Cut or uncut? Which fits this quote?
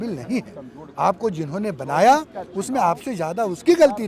uncut